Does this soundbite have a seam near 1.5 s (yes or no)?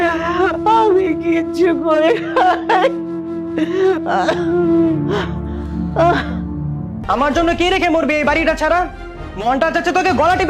no